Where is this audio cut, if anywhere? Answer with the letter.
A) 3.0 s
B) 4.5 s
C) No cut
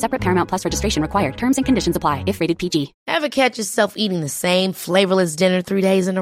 A